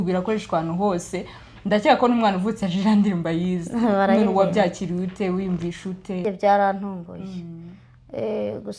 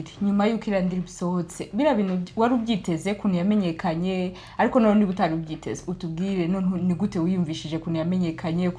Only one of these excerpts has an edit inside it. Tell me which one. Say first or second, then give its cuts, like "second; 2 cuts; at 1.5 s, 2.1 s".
first; 1 cut; at 6.2 s